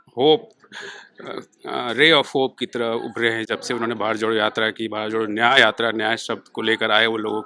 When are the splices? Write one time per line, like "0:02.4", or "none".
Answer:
none